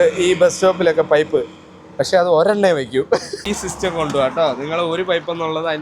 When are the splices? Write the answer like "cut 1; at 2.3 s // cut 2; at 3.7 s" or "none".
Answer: cut 1; at 3.3 s